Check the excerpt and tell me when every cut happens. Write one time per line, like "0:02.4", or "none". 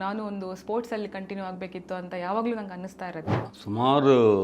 0:03.5